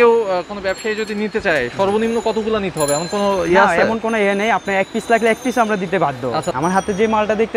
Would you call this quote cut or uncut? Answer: cut